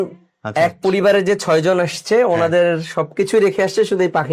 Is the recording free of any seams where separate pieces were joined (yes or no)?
yes